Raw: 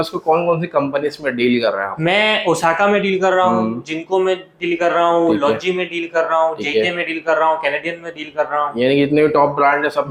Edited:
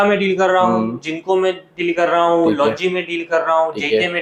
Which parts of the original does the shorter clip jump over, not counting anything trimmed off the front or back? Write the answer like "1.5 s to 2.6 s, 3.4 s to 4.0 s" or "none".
none